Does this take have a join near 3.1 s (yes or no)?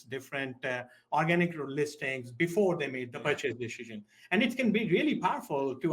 yes